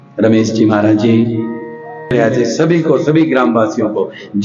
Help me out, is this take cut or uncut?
cut